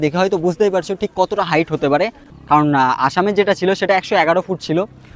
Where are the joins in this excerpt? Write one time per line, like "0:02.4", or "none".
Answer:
none